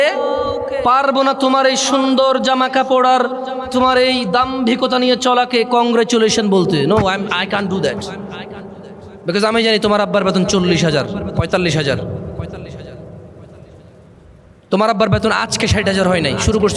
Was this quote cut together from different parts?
no; 0 cuts

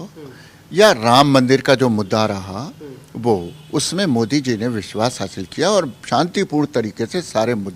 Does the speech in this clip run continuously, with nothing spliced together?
yes; 0 cuts

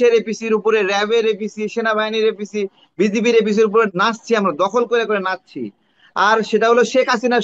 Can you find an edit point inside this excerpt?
yes; 1 cut; at 3.9 s

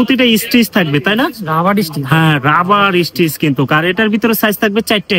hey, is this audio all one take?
yes; 0 cuts

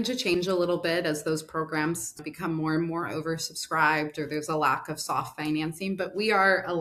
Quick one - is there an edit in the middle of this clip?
no; 0 cuts

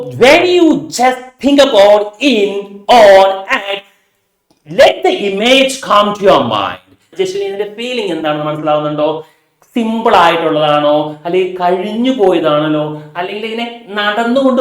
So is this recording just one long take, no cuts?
no; 1 cut; at 7.1 s

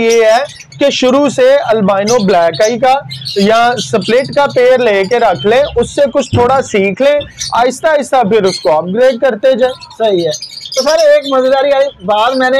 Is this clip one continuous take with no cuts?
yes; 0 cuts

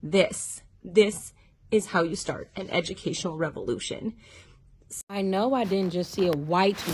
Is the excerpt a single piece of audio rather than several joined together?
no; 1 cut; at 4.8 s

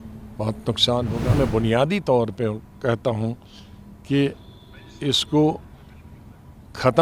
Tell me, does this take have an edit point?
yes; 1 cut; at 1.3 s

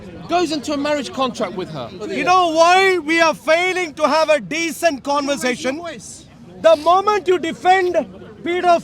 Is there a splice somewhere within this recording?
yes; 1 cut; at 2.0 s

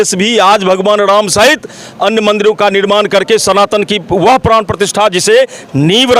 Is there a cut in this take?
no; 0 cuts

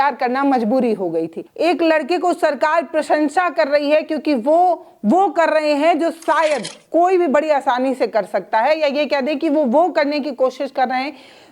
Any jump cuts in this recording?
yes; 1 cut; at 1.4 s

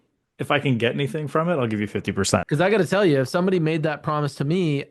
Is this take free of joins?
no; 1 cut; at 2.5 s

